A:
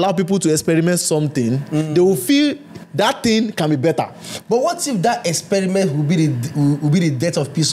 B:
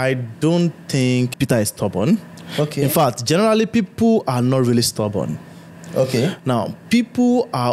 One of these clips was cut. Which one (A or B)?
B